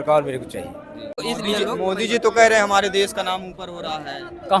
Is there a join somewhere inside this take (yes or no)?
yes